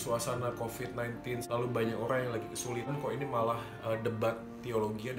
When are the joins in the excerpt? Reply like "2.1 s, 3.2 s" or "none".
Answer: 1.4 s, 2.9 s